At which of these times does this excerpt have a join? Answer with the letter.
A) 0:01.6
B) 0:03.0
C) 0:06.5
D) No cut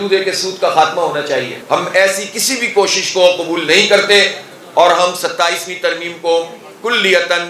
A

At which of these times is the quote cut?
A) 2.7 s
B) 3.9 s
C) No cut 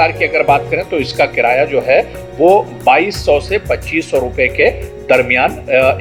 C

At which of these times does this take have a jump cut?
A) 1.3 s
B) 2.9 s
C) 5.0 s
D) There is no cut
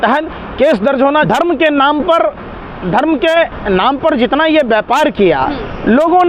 A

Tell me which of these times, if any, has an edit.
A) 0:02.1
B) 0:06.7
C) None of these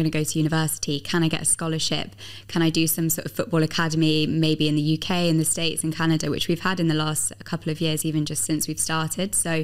C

